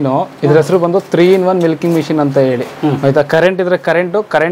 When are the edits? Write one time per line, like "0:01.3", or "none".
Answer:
none

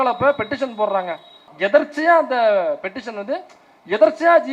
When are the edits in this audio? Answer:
0:01.5

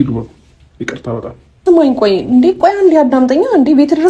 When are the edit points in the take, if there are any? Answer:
0:01.6

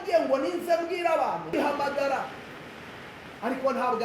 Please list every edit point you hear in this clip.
0:01.5

